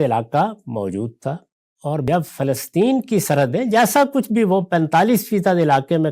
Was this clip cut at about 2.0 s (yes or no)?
yes